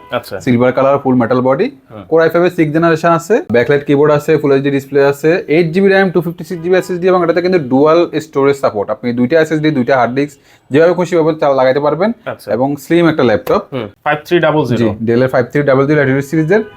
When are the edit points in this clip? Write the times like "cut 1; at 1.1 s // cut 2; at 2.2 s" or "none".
cut 1; at 3.5 s // cut 2; at 13.8 s